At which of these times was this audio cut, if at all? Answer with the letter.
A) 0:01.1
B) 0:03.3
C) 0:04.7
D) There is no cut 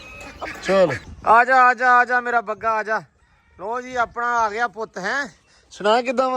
A